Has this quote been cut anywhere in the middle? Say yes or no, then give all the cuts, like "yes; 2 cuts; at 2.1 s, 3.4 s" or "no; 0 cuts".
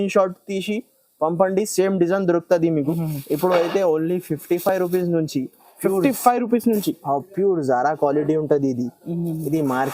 yes; 1 cut; at 3.0 s